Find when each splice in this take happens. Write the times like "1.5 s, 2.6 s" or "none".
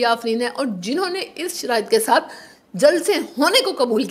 none